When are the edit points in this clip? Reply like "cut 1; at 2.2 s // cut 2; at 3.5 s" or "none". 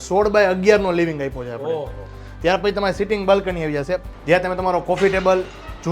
cut 1; at 4.1 s